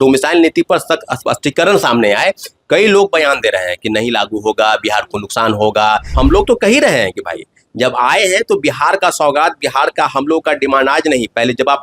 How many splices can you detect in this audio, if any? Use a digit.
1